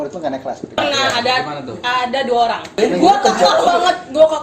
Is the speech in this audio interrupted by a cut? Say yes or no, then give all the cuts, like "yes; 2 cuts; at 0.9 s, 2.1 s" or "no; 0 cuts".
yes; 2 cuts; at 0.8 s, 2.7 s